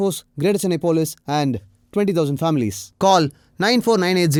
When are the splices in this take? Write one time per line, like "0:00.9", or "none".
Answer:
none